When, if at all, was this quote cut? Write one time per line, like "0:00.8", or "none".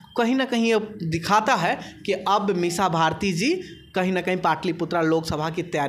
none